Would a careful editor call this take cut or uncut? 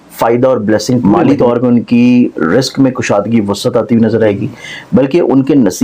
cut